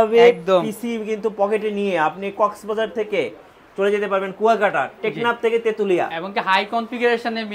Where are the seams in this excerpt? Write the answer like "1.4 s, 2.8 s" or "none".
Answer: none